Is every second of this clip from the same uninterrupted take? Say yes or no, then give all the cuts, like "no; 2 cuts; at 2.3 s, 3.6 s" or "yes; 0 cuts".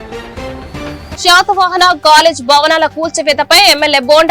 no; 1 cut; at 1.1 s